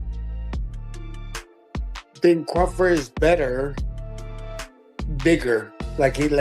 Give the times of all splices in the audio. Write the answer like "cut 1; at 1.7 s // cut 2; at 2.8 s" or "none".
cut 1; at 2.2 s